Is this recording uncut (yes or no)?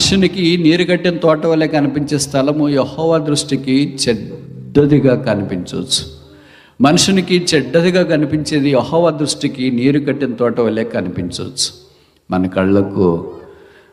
yes